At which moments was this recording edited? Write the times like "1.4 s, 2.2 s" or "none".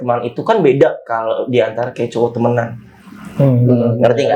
none

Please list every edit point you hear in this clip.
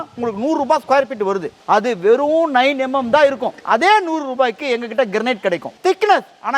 1.5 s, 3.5 s, 5.7 s

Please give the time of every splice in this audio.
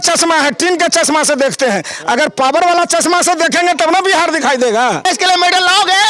5.1 s

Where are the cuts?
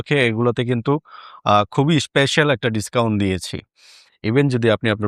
4.1 s

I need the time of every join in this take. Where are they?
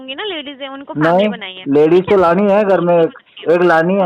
none

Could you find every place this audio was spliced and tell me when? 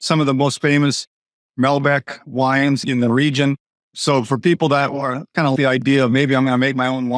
4.0 s

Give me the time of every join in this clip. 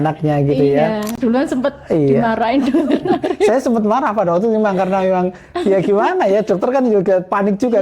1.1 s

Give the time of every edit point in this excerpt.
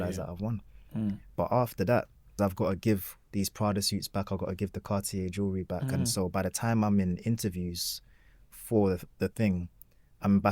2.2 s

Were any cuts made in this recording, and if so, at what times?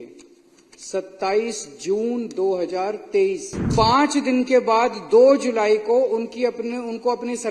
3.7 s

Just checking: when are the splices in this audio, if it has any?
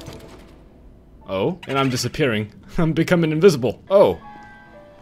none

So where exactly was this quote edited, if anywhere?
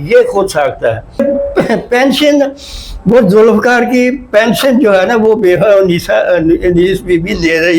1.2 s

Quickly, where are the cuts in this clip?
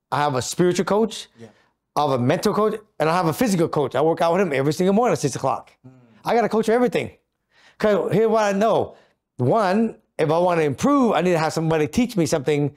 none

